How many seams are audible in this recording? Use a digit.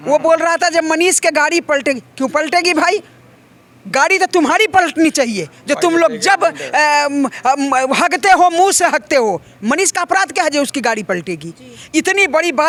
0